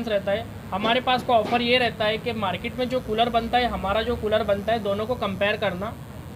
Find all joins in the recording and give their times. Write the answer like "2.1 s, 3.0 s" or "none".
none

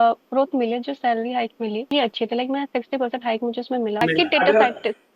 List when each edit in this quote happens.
1.9 s, 4.0 s

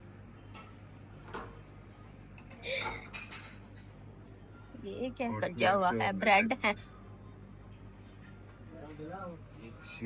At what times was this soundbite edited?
none

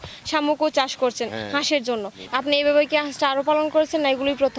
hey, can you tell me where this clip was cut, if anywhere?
2.2 s

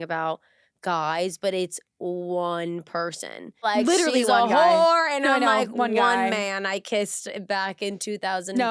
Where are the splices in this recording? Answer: 3.6 s

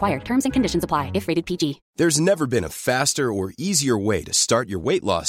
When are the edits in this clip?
1.8 s

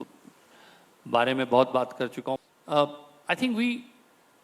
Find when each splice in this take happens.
2.2 s

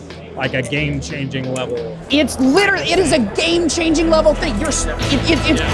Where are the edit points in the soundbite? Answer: none

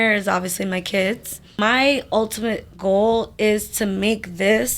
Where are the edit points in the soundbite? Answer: 1.6 s

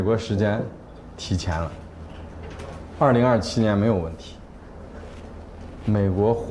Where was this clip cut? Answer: none

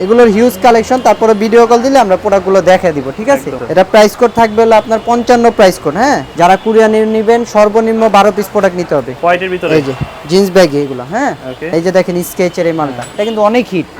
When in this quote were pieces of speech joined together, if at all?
3.6 s, 6.3 s, 9.1 s, 11.7 s

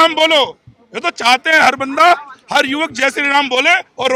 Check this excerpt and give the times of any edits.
none

